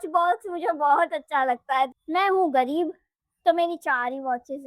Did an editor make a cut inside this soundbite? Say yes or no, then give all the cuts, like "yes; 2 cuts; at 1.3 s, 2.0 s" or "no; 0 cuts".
yes; 1 cut; at 1.9 s